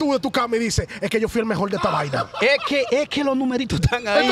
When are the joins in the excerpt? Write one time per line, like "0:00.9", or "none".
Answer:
none